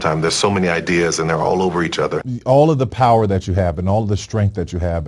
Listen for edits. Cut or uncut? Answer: cut